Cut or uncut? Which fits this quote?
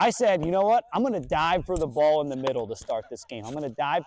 uncut